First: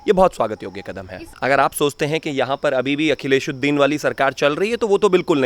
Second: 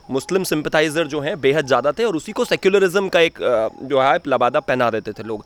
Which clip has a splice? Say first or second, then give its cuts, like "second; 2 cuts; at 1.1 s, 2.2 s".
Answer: first; 1 cut; at 1.2 s